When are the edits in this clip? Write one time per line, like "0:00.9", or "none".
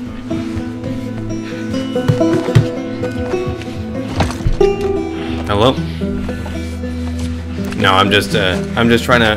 none